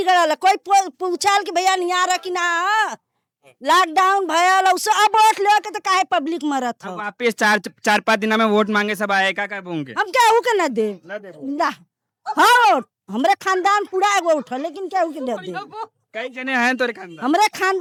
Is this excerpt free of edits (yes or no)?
yes